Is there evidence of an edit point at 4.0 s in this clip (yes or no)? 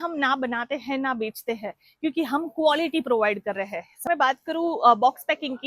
yes